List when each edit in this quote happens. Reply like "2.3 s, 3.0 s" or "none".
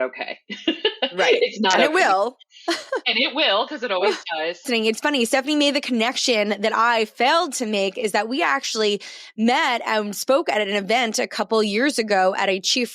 4.7 s

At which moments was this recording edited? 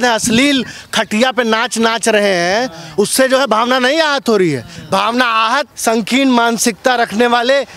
4.7 s, 5.7 s

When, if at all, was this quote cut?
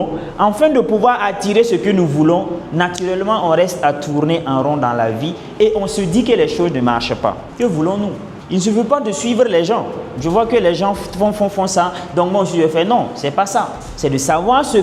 7.5 s, 8.3 s, 13.8 s

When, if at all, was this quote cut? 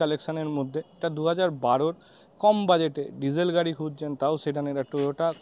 none

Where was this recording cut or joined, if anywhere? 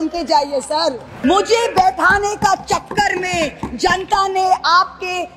1.1 s

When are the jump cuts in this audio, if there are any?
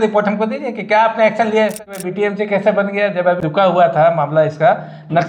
2.0 s, 3.4 s

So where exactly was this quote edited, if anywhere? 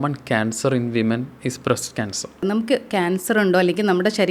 2.4 s

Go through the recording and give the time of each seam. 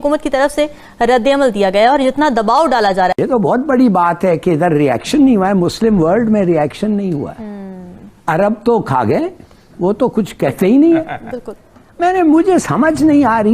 3.1 s

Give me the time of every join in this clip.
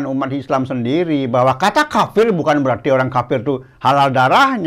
none

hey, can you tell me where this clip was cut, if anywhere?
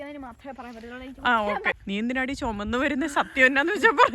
1.8 s

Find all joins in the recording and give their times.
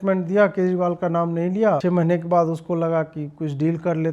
1.8 s

